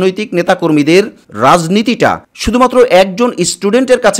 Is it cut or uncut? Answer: uncut